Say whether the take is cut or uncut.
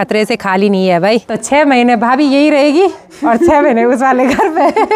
cut